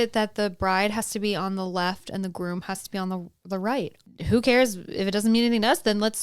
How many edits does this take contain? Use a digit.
1